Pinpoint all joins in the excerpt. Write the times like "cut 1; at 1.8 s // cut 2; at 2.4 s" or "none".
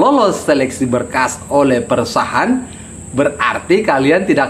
none